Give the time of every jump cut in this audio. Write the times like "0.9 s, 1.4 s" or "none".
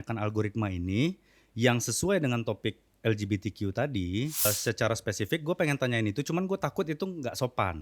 4.5 s